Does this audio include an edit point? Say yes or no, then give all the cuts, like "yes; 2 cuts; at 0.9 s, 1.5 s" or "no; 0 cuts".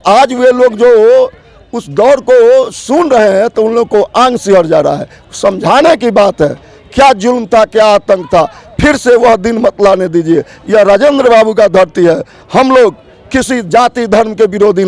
no; 0 cuts